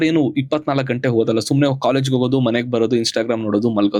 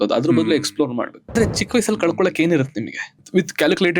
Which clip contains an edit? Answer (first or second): second